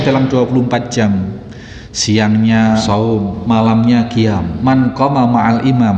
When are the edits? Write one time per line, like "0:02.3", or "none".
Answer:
0:03.0
0:04.5